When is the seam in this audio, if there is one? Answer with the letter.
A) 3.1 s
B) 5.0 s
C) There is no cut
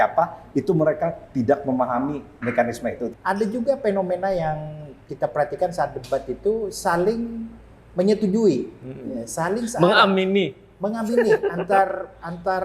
A